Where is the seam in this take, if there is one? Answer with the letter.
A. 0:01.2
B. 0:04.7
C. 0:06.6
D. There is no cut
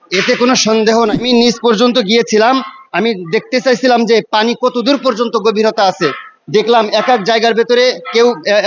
A